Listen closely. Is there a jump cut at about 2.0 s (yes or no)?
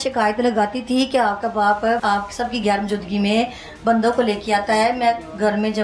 yes